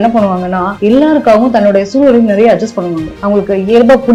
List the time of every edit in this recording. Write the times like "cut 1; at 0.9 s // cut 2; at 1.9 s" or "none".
none